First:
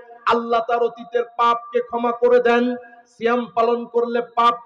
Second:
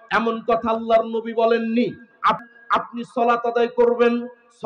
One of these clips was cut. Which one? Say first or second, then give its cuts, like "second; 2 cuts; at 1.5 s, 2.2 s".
second; 1 cut; at 2.4 s